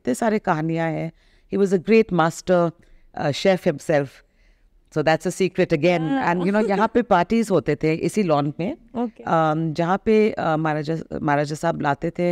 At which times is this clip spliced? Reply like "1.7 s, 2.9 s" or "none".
none